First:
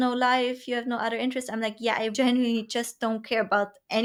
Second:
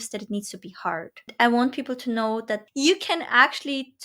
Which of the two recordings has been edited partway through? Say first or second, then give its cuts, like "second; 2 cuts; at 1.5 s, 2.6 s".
second; 2 cuts; at 1.3 s, 2.7 s